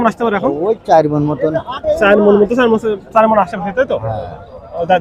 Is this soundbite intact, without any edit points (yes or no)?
yes